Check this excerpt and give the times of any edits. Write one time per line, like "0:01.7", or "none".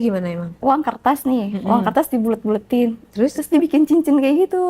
0:00.9